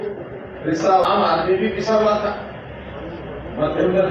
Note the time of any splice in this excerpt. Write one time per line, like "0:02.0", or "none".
0:01.0